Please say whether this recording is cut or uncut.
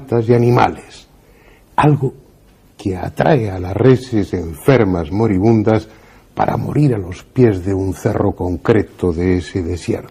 cut